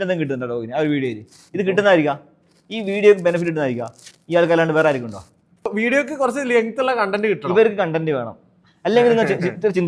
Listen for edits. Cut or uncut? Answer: cut